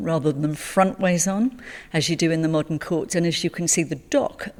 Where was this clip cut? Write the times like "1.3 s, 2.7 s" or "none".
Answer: none